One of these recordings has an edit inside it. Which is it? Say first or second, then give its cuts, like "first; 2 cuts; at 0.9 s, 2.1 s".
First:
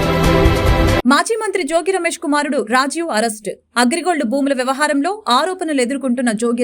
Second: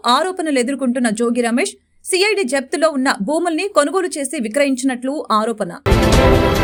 first; 1 cut; at 1.0 s